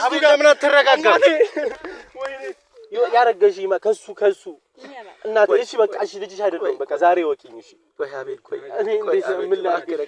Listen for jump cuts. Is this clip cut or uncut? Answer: cut